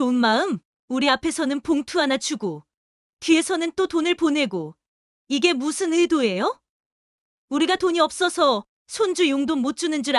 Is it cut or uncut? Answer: uncut